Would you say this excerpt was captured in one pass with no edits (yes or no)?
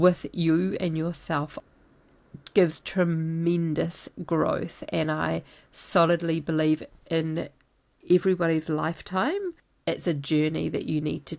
no